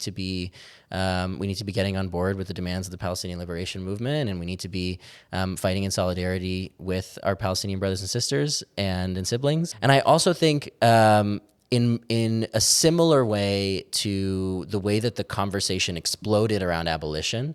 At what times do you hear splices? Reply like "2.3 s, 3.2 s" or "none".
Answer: 9.7 s